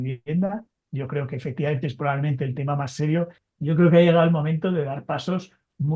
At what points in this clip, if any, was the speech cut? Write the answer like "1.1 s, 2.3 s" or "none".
3.4 s